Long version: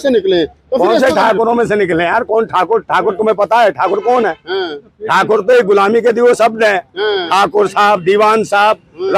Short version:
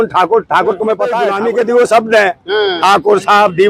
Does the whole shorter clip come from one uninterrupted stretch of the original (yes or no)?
no